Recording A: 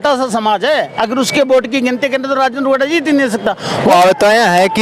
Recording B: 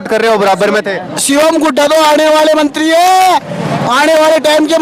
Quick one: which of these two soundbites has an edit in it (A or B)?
A